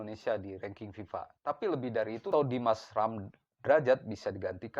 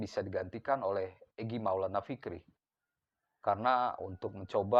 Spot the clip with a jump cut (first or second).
first